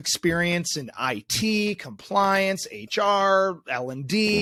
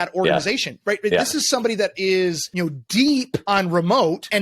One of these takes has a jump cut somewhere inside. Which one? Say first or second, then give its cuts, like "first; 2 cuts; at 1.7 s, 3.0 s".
second; 2 cuts; at 2.5 s, 3.4 s